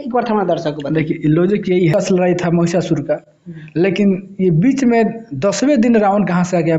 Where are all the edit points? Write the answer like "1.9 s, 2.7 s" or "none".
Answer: 1.9 s